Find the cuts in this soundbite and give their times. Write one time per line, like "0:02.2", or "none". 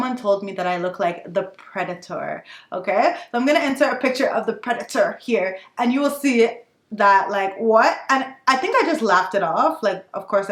none